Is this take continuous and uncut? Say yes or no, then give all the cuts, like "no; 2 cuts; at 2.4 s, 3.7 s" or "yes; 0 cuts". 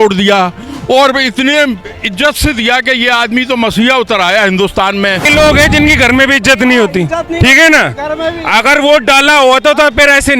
no; 1 cut; at 5.2 s